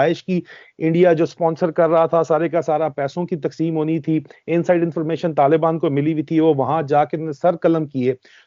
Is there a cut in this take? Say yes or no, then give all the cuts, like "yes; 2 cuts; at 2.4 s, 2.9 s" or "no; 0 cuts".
no; 0 cuts